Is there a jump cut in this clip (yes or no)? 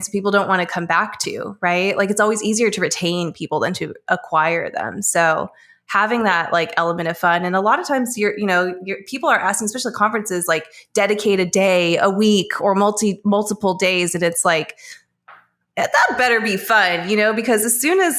no